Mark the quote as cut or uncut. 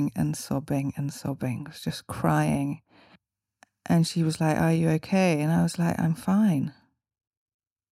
cut